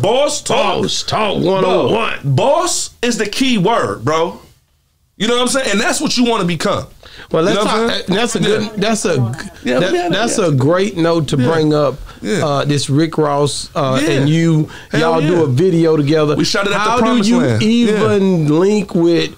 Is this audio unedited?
yes; 0 cuts

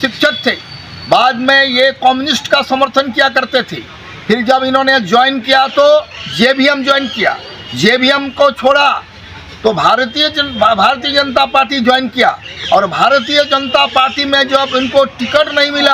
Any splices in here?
no; 0 cuts

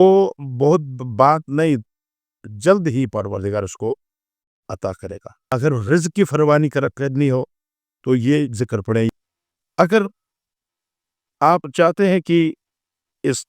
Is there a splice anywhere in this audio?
yes; 2 cuts; at 5.4 s, 9.1 s

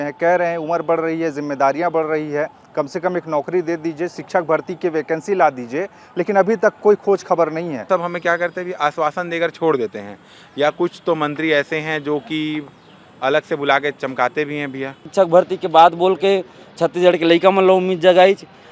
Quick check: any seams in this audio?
yes; 2 cuts; at 7.9 s, 15.1 s

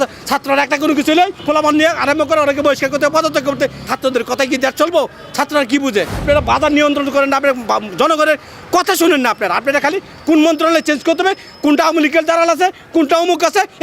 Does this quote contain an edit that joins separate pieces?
yes; 3 cuts; at 1.4 s, 3.9 s, 6.2 s

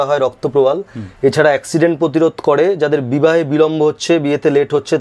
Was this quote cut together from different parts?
no; 0 cuts

